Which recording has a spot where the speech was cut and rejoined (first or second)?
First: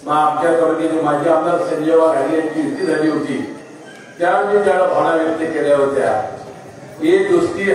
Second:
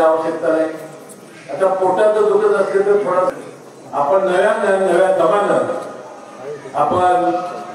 second